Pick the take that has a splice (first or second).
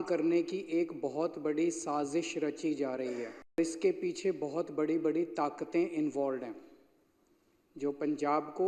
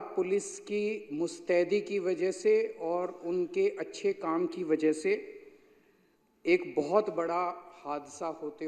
first